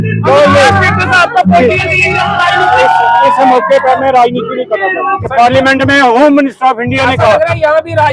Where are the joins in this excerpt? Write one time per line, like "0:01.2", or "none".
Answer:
0:05.2